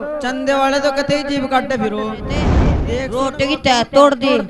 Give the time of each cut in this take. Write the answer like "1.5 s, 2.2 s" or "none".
2.7 s